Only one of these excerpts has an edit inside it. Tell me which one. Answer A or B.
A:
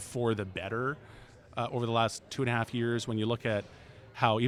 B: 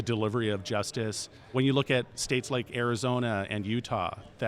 B